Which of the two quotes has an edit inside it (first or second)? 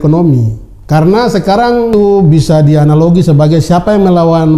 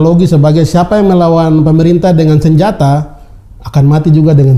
first